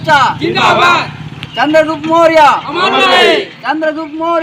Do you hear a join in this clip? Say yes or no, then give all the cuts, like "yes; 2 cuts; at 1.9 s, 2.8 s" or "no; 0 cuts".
yes; 1 cut; at 1.3 s